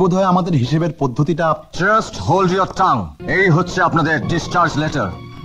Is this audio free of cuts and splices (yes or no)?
no